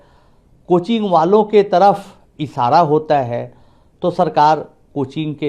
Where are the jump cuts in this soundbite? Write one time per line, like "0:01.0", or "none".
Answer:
none